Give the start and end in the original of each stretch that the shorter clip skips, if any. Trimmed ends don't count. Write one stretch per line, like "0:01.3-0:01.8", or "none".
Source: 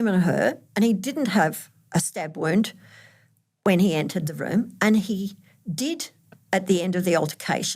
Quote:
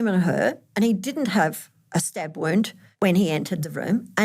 0:02.8-0:03.5